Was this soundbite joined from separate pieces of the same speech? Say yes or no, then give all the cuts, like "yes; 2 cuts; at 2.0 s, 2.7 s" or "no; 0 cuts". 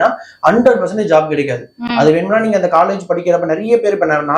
no; 0 cuts